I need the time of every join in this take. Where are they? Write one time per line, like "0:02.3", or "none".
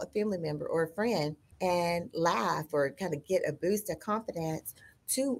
0:01.4